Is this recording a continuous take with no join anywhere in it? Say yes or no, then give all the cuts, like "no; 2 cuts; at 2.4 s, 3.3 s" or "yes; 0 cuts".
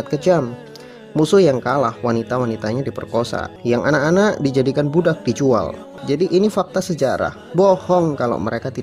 no; 2 cuts; at 3.5 s, 5.9 s